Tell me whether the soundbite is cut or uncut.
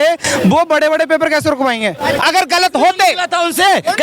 cut